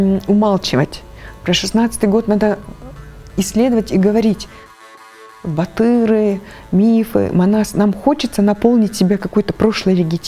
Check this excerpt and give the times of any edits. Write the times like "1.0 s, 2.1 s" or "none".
4.9 s